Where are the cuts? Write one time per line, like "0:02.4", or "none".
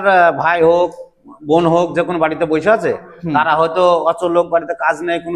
none